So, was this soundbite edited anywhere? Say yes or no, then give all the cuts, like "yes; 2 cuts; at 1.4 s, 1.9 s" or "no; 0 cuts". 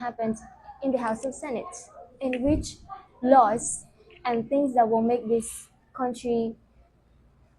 no; 0 cuts